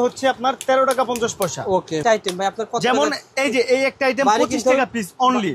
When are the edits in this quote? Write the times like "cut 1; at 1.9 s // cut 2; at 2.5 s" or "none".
cut 1; at 2.0 s